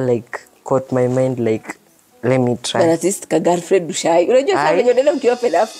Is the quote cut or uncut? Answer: uncut